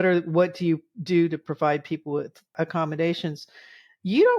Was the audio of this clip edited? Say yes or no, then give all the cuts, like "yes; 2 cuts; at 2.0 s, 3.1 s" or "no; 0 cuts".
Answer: yes; 1 cut; at 2.5 s